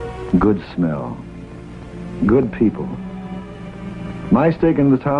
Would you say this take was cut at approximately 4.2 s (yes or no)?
no